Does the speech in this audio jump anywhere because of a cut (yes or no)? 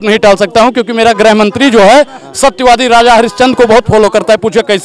no